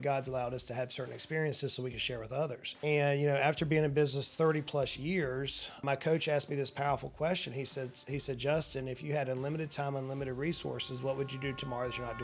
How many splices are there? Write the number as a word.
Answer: one